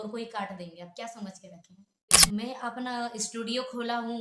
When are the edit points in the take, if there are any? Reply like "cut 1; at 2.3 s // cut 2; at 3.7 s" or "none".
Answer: cut 1; at 2.2 s